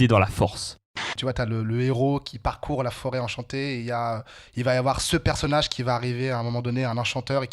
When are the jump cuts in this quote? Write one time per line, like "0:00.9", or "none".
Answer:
0:01.1